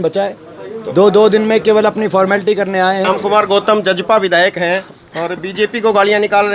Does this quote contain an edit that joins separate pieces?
yes; 1 cut; at 3.1 s

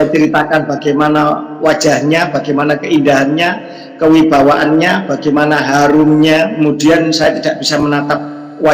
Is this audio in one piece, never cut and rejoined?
no; 1 cut; at 6.5 s

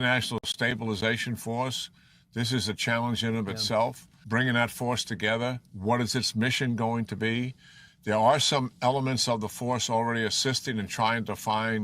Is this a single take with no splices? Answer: no; 1 cut; at 4.1 s

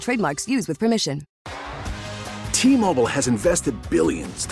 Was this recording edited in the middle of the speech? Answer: yes; 1 cut; at 1.4 s

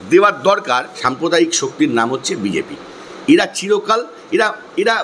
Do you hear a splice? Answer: yes; 1 cut; at 1.1 s

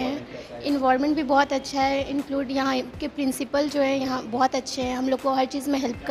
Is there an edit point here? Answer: no; 0 cuts

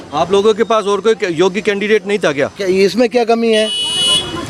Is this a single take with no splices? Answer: yes; 0 cuts

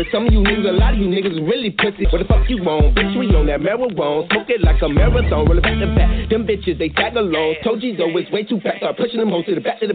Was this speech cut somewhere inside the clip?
yes; 1 cut; at 2.1 s

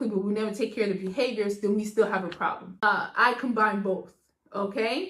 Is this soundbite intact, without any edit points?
no; 1 cut; at 2.7 s

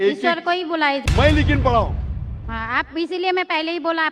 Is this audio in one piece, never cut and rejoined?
no; 1 cut; at 1.0 s

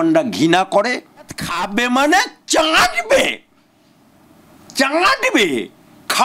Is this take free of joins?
no; 1 cut; at 1.5 s

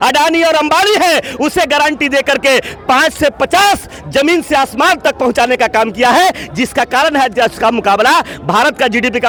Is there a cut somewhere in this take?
no; 0 cuts

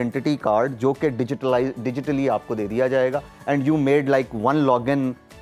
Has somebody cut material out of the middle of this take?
no; 0 cuts

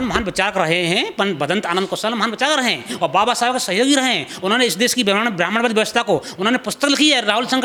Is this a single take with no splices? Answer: yes; 0 cuts

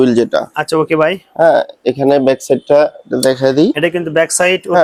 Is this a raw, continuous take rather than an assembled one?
yes; 0 cuts

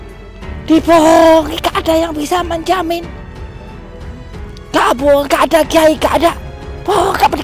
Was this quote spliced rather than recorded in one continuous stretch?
yes; 2 cuts; at 3.1 s, 4.7 s

